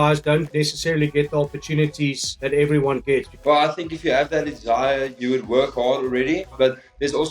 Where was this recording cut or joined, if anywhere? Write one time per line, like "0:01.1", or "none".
0:03.4
0:05.1
0:06.6